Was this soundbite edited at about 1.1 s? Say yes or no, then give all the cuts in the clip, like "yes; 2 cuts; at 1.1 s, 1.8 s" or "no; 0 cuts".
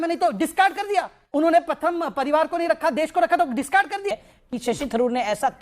no; 1 cut; at 4.1 s